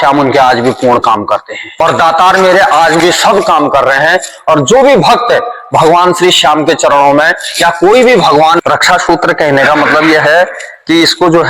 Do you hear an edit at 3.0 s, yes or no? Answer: no